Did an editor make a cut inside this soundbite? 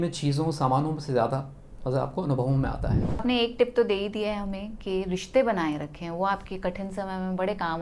yes; 1 cut; at 3.2 s

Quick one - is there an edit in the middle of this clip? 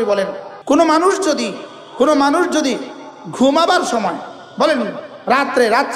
no; 0 cuts

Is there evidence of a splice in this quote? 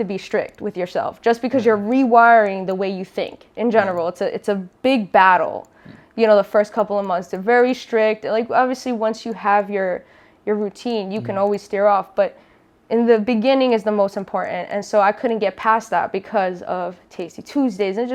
no; 0 cuts

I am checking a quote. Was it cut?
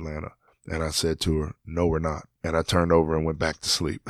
no; 0 cuts

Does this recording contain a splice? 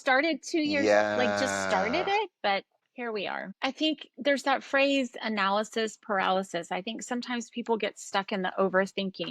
yes; 1 cut; at 3.3 s

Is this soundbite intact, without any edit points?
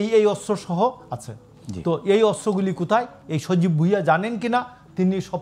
yes; 0 cuts

